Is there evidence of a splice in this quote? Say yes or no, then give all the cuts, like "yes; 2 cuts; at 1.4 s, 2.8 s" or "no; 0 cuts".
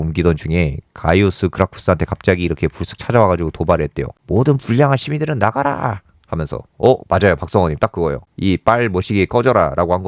yes; 1 cut; at 6.6 s